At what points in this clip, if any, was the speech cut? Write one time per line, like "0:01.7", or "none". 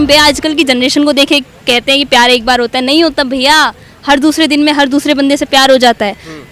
none